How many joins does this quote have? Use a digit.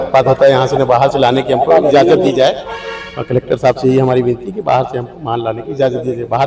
0